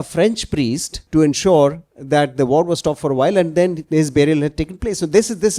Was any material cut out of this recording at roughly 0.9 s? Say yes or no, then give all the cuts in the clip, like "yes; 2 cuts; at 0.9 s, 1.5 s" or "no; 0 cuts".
yes; 1 cut; at 0.9 s